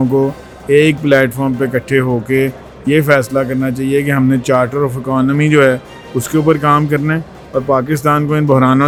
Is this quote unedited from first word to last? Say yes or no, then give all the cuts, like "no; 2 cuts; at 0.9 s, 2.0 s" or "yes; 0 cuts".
yes; 0 cuts